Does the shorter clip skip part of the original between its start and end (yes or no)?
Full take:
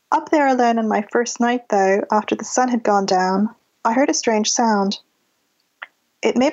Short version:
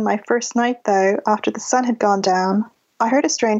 no